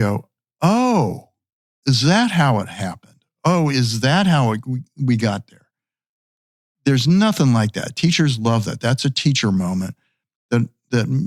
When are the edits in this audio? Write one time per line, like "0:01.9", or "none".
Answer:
none